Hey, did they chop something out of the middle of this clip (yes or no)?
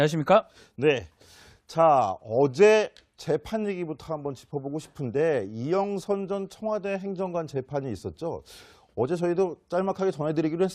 no